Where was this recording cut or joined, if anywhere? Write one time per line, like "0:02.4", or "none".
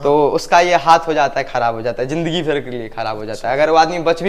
none